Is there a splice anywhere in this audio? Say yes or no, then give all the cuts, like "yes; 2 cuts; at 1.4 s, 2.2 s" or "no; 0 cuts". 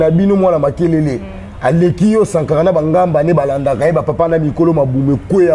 no; 0 cuts